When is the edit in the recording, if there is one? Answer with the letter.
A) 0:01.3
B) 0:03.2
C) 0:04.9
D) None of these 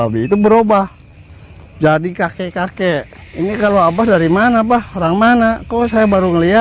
B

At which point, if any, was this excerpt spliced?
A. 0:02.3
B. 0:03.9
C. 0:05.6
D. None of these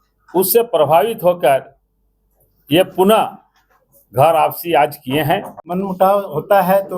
C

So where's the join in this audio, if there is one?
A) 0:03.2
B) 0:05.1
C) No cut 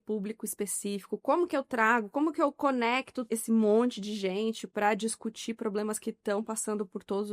A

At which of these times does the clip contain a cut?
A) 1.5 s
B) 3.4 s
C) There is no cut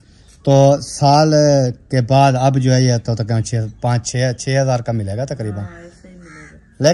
C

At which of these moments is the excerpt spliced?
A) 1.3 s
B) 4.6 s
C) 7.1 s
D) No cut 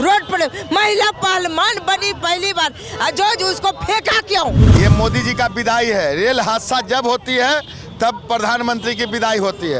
B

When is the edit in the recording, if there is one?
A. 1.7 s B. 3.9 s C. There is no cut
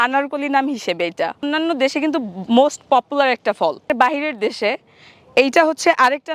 B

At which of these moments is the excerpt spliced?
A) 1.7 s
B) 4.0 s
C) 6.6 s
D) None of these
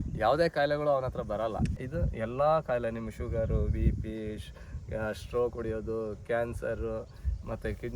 A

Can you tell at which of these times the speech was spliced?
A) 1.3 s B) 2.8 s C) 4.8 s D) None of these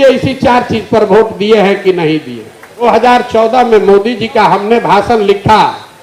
B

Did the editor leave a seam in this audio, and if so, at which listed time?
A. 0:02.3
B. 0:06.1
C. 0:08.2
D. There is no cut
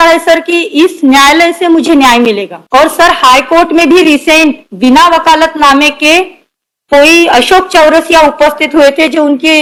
D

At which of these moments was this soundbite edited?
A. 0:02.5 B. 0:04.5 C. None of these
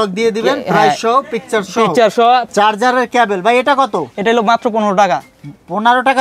A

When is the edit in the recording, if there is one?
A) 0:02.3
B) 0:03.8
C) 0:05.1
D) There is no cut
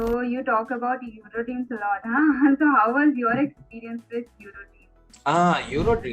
C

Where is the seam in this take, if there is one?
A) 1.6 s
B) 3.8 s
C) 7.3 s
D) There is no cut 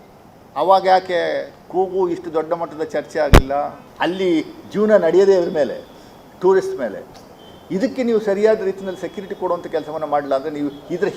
B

